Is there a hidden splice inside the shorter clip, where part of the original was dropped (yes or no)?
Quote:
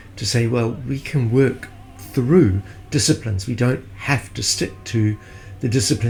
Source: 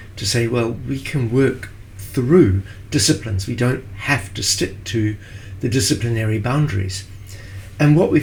no